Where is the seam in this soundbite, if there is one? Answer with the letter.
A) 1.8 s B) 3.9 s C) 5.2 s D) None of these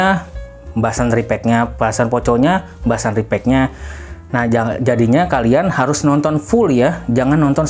D